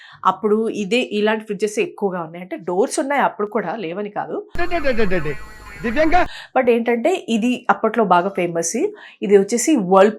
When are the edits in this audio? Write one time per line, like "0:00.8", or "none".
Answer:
none